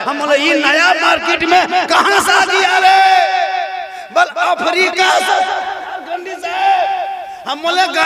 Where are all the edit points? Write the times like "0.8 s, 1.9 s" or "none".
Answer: none

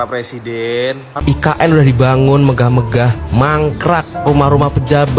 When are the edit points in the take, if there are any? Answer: 1.1 s

